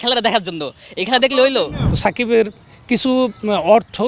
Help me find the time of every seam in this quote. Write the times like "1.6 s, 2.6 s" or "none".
2.0 s